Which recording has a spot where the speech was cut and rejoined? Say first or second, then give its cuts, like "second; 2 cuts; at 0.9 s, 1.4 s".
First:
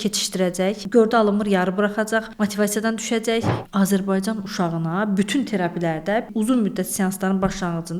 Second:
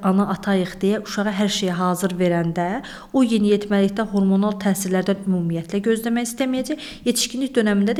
first; 4 cuts; at 0.8 s, 2.3 s, 3.6 s, 6.3 s